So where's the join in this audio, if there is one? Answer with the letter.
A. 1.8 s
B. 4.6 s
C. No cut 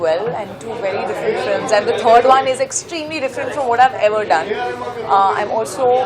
C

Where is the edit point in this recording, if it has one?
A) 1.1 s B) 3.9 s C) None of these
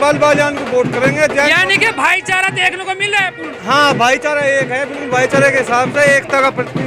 C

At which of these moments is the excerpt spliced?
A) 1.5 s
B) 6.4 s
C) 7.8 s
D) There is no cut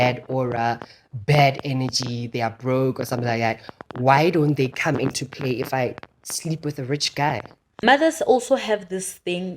C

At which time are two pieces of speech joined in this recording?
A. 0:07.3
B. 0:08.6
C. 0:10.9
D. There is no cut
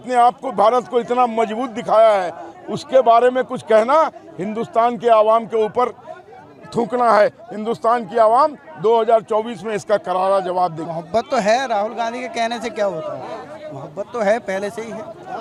D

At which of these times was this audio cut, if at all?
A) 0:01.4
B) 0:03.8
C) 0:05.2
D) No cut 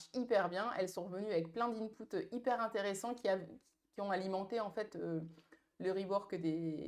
D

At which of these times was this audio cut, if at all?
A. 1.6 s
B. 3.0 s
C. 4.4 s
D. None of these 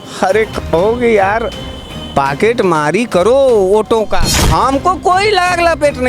C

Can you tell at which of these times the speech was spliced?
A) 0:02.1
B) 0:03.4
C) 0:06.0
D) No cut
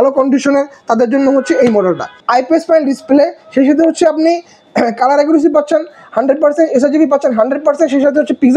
A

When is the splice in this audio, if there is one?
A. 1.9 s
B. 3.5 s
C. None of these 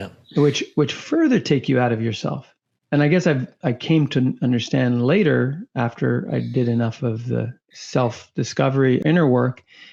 C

